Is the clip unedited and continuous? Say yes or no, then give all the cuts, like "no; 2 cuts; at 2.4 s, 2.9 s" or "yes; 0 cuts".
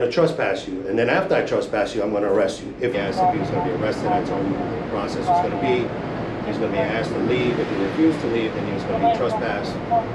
no; 1 cut; at 2.9 s